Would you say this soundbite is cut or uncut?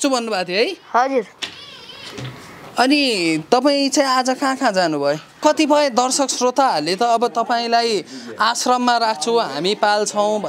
cut